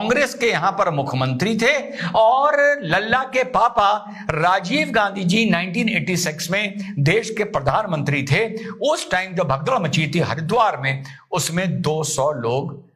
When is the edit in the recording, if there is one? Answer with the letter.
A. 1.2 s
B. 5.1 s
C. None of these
C